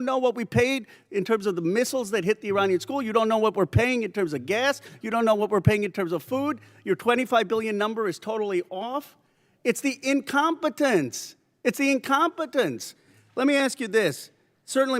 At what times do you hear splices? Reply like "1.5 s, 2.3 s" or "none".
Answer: 11.8 s